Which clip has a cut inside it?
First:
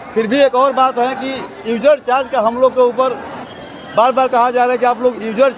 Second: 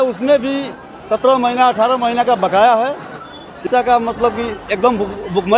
second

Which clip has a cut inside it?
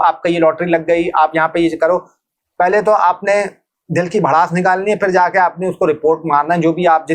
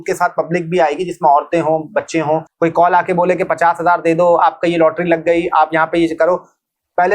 second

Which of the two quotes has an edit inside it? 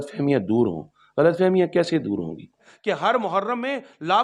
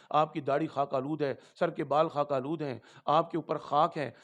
first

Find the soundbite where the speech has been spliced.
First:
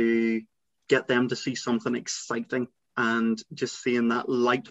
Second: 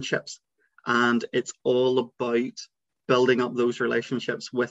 first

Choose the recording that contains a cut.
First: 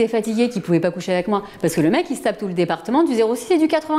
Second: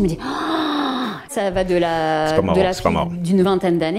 second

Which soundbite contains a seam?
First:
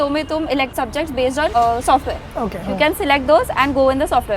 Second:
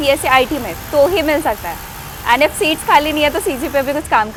first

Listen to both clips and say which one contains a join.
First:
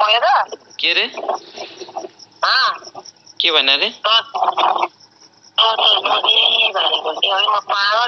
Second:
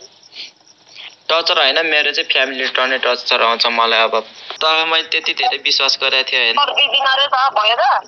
second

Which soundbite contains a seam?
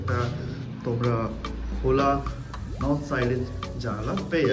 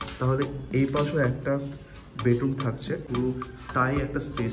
second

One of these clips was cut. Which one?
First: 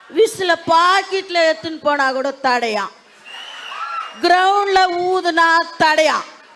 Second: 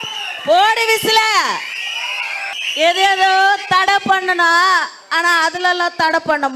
second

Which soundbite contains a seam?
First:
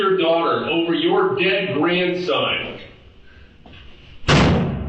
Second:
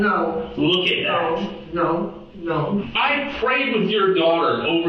second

